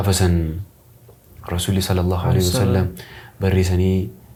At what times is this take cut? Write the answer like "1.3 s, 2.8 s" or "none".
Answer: none